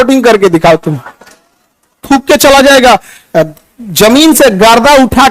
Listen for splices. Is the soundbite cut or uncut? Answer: cut